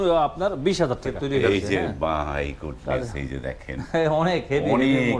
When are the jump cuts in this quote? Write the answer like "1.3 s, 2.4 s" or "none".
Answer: 1.1 s